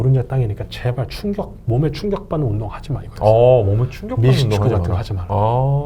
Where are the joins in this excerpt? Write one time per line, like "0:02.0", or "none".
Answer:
none